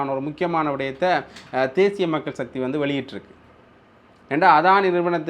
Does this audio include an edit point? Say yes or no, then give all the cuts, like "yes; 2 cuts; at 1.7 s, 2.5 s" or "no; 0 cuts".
no; 0 cuts